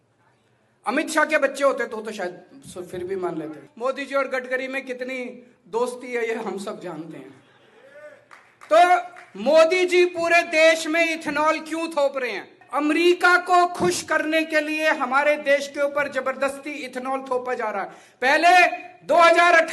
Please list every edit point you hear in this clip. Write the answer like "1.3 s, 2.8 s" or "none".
3.7 s, 12.6 s